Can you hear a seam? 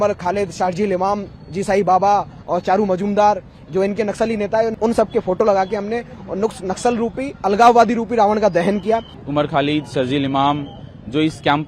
yes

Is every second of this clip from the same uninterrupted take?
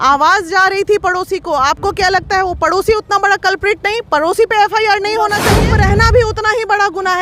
no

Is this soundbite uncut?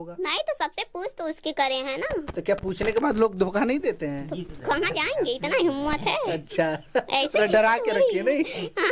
yes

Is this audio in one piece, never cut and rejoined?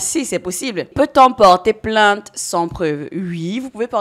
no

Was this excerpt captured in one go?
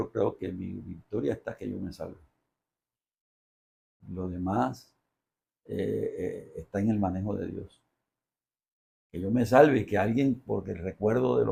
yes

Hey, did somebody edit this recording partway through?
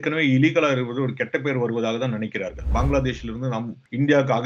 yes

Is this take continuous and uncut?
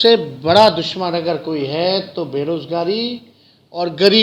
yes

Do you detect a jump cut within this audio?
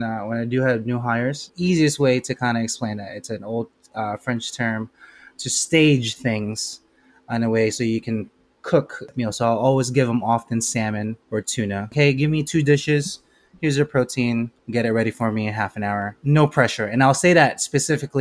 yes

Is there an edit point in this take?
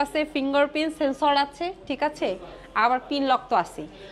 no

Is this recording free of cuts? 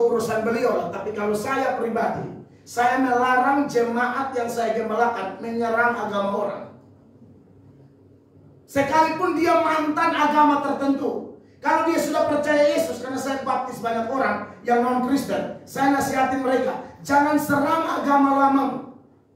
yes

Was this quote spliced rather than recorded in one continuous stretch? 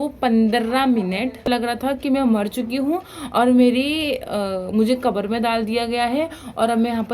yes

